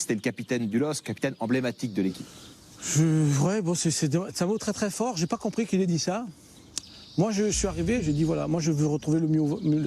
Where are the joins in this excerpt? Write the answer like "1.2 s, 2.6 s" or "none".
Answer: none